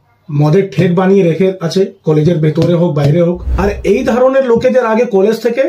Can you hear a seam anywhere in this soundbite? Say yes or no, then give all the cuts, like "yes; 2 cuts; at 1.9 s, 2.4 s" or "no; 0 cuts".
yes; 1 cut; at 3.5 s